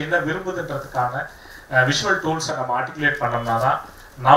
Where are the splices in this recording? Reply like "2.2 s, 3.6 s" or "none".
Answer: none